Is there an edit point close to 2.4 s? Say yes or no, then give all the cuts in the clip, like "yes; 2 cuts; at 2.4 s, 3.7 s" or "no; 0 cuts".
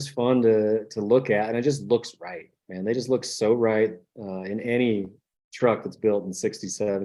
no; 0 cuts